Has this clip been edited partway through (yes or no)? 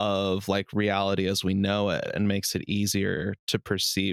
no